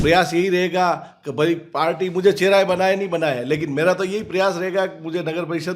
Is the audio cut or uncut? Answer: uncut